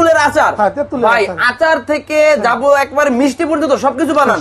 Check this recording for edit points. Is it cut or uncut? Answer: uncut